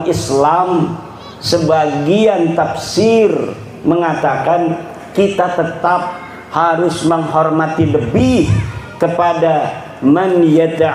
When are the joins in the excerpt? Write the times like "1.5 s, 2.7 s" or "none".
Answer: none